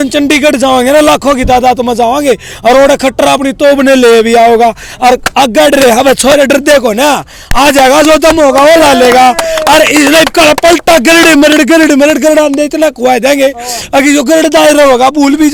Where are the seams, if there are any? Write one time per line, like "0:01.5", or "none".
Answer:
none